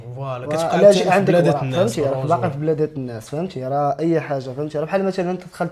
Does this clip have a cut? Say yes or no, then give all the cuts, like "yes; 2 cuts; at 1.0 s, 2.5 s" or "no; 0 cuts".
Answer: no; 0 cuts